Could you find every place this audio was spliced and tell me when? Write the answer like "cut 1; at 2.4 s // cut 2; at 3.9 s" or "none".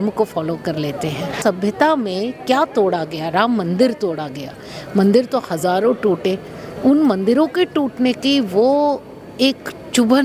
cut 1; at 1.4 s